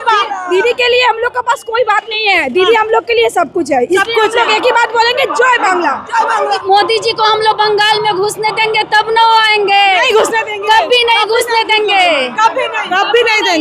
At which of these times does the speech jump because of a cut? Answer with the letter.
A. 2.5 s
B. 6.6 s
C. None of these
B